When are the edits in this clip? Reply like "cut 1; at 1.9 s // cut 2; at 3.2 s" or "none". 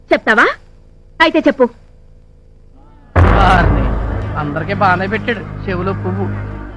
none